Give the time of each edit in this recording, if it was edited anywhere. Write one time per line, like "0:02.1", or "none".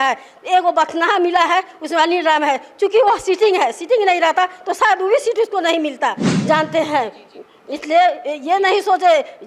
0:06.3

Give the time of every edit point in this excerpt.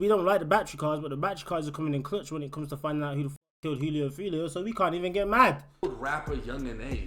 0:05.8

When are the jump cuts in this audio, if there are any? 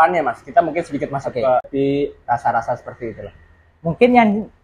0:01.7

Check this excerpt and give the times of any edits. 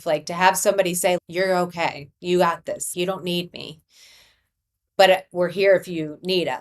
0:01.2
0:02.9

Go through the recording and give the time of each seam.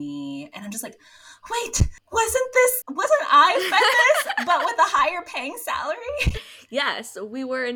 0:06.5

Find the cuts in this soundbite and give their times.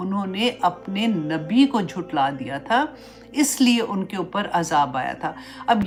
none

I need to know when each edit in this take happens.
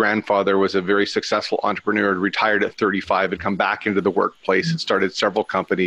none

